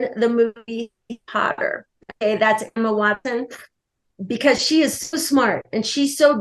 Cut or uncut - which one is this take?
cut